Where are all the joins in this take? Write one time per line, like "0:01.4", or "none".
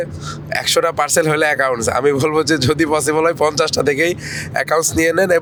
none